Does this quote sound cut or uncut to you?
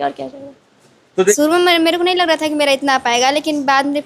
cut